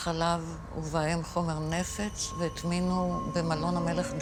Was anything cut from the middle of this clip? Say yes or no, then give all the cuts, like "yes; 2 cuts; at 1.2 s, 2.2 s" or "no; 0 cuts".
no; 0 cuts